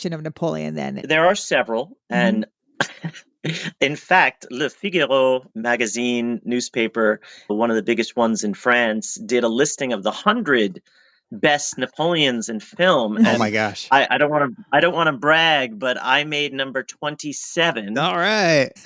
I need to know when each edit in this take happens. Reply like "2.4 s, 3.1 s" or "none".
1.0 s